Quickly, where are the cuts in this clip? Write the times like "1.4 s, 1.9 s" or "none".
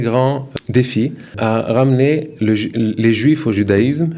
1.3 s